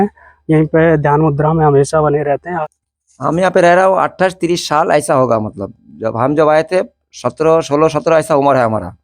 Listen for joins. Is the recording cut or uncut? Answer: cut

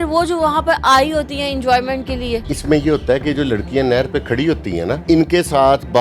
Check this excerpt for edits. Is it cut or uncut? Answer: cut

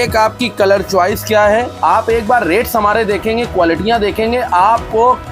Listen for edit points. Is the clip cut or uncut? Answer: cut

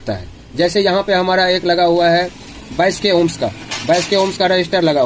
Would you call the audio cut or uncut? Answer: uncut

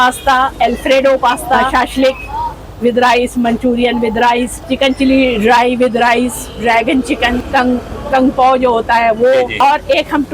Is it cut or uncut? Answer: cut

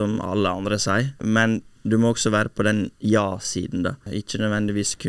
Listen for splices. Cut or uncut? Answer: cut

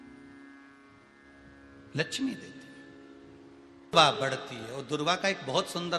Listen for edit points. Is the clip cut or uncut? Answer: cut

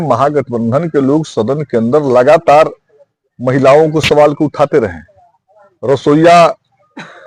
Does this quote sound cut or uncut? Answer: uncut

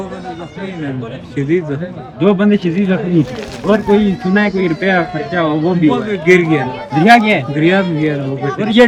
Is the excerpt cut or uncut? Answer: uncut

